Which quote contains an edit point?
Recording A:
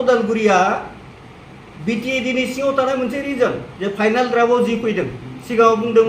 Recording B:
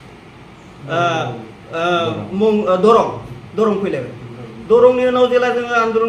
A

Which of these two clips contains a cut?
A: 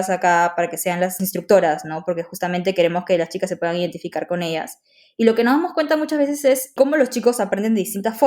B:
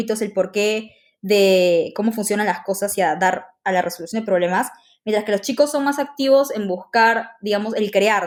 A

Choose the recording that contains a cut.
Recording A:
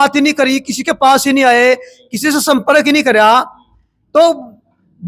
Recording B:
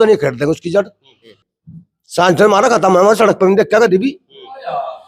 B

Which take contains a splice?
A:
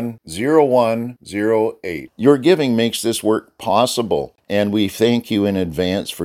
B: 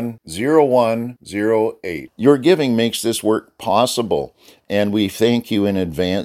A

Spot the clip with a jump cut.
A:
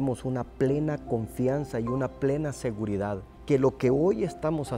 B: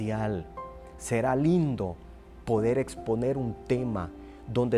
A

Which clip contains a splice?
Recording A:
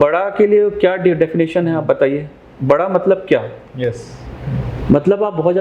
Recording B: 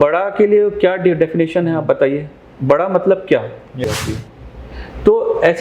B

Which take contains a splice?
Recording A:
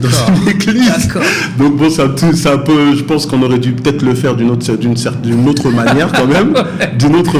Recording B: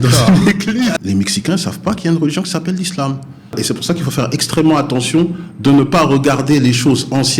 B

